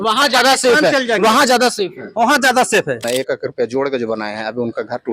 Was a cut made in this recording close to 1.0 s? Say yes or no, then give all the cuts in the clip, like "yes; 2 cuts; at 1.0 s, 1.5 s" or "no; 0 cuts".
no; 1 cut; at 3.0 s